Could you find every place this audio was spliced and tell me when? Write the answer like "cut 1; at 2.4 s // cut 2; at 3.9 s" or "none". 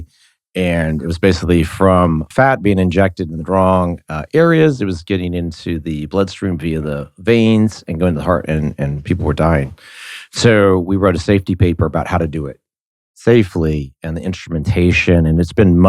cut 1; at 2.3 s

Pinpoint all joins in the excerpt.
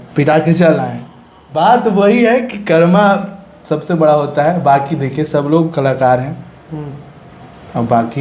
none

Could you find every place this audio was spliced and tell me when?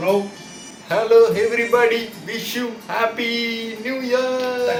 none

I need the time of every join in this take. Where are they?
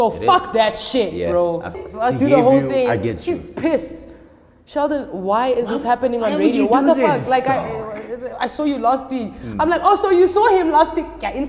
cut 1; at 1.8 s

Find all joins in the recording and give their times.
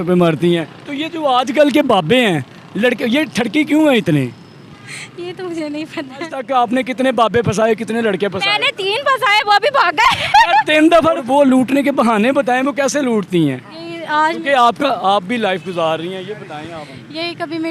cut 1; at 6.4 s // cut 2; at 11.2 s

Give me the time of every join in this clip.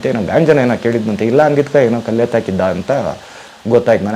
none

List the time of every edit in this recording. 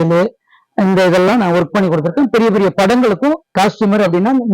cut 1; at 3.5 s

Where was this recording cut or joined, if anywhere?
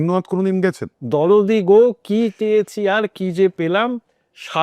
cut 1; at 0.9 s

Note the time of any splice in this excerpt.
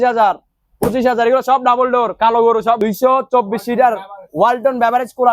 cut 1; at 2.8 s

